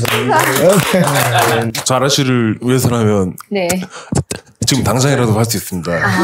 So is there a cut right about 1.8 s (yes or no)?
yes